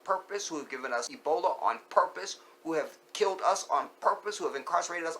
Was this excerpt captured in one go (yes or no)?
no